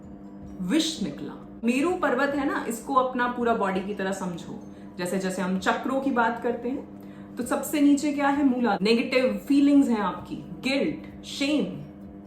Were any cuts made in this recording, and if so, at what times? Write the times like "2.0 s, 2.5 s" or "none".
1.6 s, 8.8 s